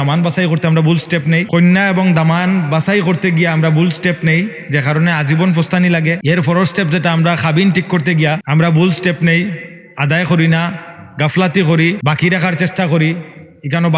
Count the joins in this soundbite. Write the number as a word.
four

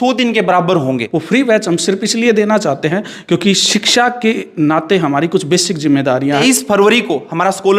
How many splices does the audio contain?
two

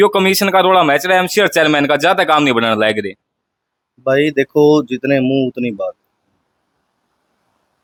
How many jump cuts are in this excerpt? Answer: zero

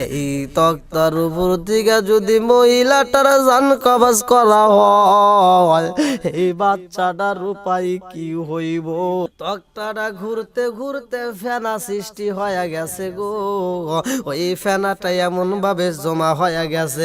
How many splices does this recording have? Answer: one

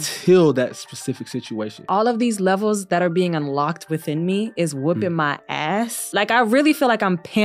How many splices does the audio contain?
two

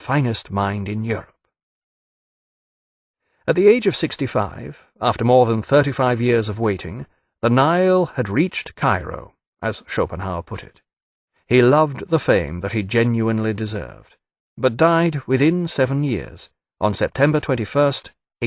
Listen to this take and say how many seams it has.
zero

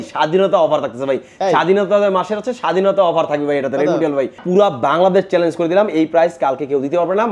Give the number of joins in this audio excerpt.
one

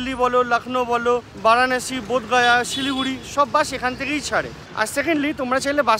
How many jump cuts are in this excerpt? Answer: zero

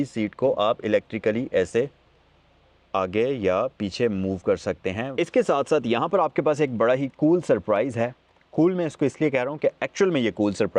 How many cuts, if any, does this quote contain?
one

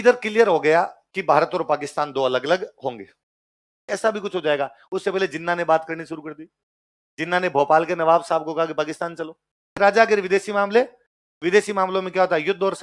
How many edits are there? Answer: two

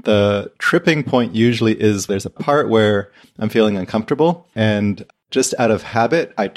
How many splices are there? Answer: two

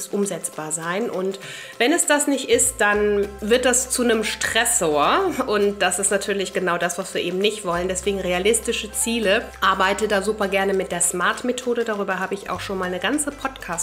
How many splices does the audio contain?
two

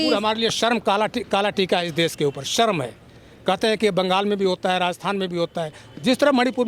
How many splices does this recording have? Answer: zero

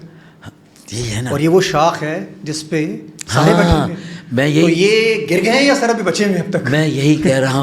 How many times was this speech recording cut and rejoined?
zero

